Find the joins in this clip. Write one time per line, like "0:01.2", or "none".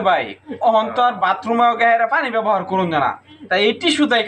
none

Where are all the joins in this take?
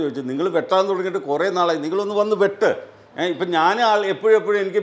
none

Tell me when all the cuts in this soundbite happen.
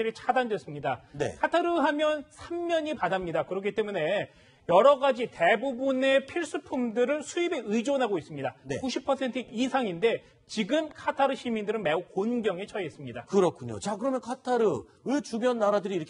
none

